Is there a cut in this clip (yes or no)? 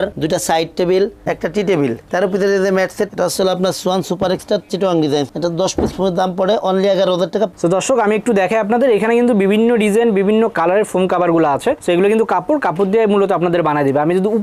yes